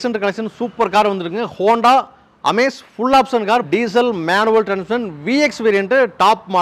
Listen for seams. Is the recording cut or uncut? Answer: cut